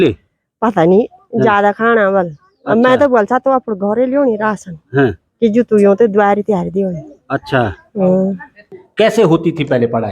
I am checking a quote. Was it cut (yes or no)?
yes